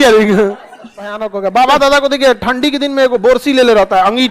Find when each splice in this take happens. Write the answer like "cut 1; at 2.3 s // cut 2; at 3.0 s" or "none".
cut 1; at 1.2 s